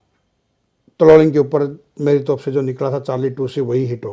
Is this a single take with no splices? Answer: yes; 0 cuts

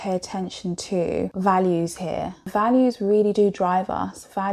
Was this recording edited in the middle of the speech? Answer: yes; 2 cuts; at 1.3 s, 2.5 s

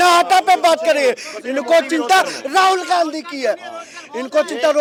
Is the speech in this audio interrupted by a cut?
no; 0 cuts

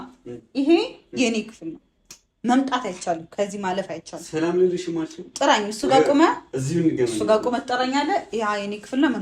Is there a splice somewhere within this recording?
no; 0 cuts

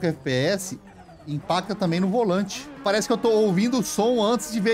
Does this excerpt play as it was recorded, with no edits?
no; 1 cut; at 2.8 s

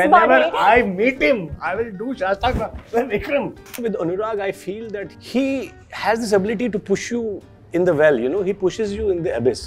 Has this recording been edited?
yes; 2 cuts; at 3.8 s, 5.1 s

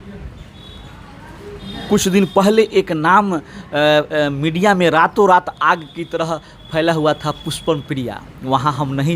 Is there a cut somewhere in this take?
no; 0 cuts

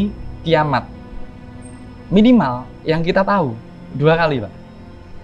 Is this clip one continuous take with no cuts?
yes; 0 cuts

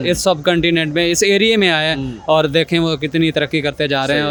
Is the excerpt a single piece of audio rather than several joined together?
yes; 0 cuts

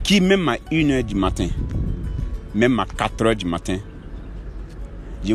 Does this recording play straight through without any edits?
yes; 0 cuts

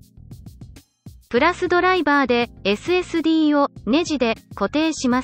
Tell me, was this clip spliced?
yes; 1 cut; at 1.2 s

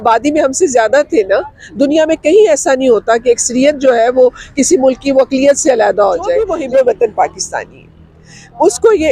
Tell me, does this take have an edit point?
yes; 1 cut; at 6.5 s

